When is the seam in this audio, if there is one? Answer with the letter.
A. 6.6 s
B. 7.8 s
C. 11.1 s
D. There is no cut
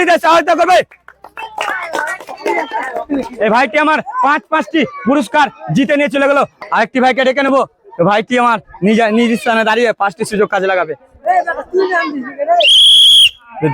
A